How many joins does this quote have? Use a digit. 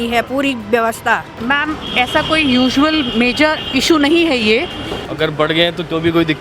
2